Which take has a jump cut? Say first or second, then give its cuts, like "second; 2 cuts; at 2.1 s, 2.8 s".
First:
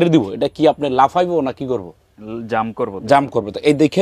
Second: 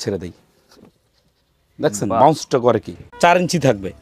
second; 1 cut; at 3.0 s